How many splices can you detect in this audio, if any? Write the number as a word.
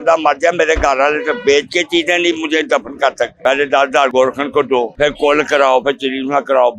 three